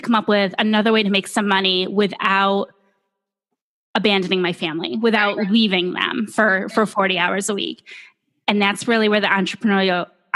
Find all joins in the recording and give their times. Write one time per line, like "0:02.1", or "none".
none